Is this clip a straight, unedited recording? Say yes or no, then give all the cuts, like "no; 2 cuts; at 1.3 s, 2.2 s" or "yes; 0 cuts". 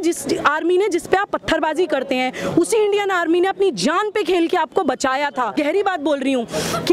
no; 1 cut; at 5.5 s